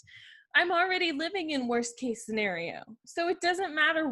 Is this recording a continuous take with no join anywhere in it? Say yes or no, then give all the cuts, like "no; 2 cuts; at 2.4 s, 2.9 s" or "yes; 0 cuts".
no; 1 cut; at 2.9 s